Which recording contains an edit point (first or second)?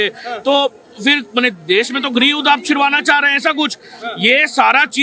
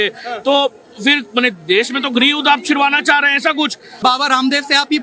second